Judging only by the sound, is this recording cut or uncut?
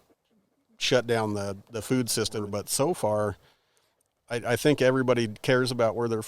cut